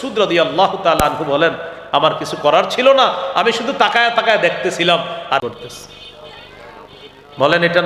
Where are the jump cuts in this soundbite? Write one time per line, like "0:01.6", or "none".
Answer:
0:05.4